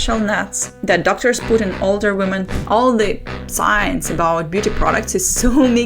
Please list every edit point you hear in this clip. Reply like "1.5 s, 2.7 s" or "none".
2.5 s